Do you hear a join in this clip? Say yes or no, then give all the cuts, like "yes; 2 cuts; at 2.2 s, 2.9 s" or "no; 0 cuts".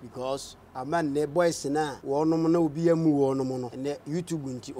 yes; 2 cuts; at 2.0 s, 3.7 s